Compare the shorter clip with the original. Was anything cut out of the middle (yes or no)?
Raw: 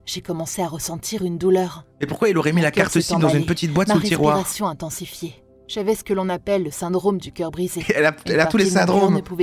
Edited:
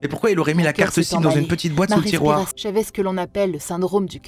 yes